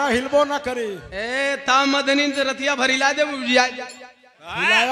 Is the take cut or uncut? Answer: uncut